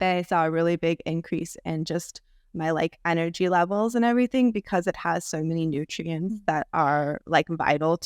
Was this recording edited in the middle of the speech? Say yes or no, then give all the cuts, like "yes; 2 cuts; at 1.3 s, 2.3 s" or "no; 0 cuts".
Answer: no; 0 cuts